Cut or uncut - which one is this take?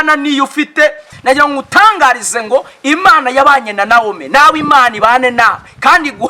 cut